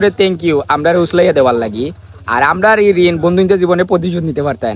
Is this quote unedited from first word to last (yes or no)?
yes